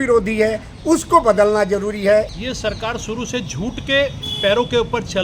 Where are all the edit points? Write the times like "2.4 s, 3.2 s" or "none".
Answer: 2.3 s